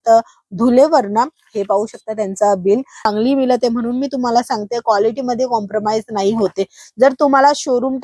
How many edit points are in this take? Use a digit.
1